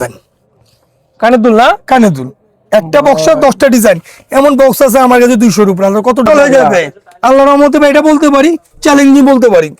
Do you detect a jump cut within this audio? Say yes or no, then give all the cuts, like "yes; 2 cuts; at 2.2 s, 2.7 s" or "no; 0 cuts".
yes; 1 cut; at 6.3 s